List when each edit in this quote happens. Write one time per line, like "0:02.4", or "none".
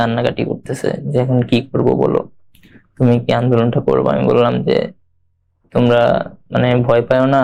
none